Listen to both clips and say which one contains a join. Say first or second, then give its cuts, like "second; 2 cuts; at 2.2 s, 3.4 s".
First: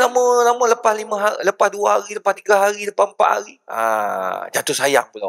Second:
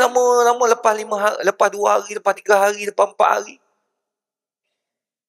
first; 1 cut; at 3.6 s